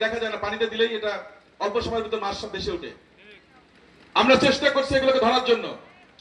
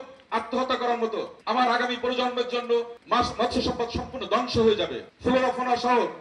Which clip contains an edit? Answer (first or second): second